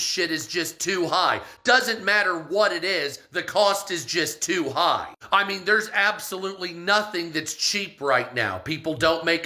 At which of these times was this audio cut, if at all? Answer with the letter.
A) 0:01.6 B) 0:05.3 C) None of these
C